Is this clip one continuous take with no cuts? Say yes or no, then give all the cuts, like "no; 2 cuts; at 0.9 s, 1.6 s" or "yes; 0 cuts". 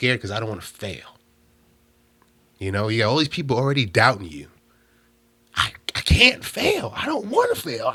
yes; 0 cuts